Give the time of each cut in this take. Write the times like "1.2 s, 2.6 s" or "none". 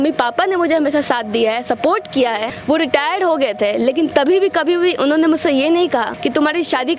2.5 s, 6.1 s

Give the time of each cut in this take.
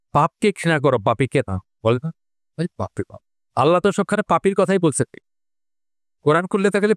none

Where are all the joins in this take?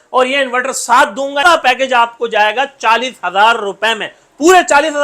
1.4 s

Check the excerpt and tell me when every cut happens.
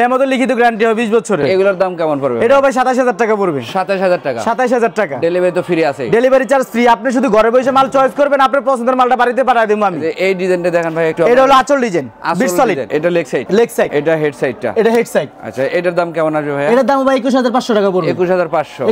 none

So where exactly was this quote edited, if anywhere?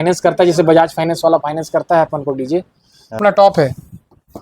3.2 s

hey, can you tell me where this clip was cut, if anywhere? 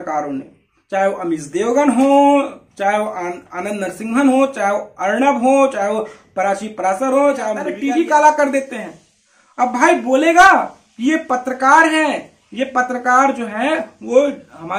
7.7 s

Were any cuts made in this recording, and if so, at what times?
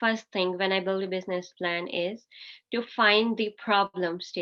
none

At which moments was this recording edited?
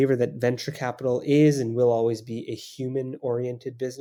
none

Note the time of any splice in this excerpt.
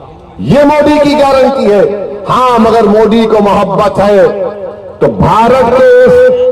none

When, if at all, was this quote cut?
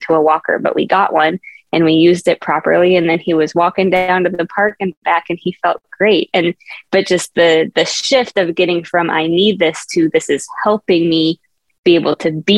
none

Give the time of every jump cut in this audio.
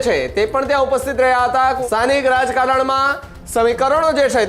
1.8 s

